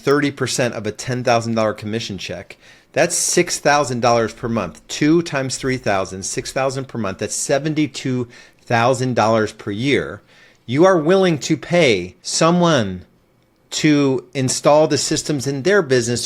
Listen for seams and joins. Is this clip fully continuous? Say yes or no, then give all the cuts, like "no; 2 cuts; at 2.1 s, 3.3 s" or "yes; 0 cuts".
no; 1 cut; at 12.2 s